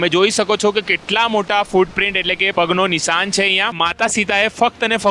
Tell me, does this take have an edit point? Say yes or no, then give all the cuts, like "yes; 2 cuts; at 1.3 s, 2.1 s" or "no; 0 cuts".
yes; 1 cut; at 3.8 s